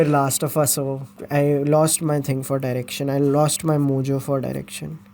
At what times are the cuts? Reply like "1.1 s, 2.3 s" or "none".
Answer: 1.2 s